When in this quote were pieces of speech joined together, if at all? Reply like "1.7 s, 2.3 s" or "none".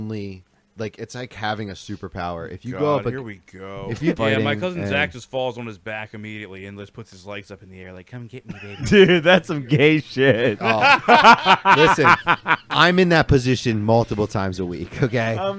4.2 s, 8.8 s

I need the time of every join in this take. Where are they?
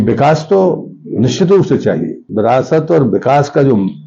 2.2 s

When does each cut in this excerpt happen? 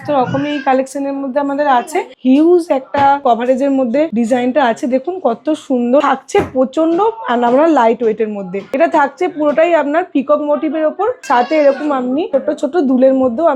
2.1 s, 3.2 s, 4.1 s, 6.0 s, 8.6 s, 11.2 s, 12.3 s

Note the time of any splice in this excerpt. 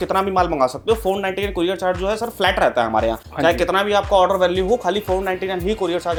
none

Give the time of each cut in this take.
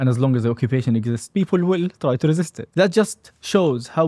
1.2 s, 2.6 s

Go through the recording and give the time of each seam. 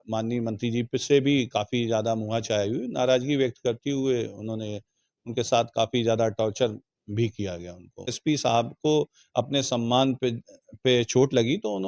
8.2 s

